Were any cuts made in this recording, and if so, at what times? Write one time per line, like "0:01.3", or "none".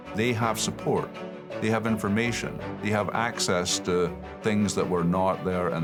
none